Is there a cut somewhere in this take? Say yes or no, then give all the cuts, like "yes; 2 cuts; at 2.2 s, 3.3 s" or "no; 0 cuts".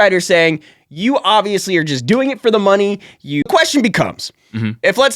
yes; 1 cut; at 3.5 s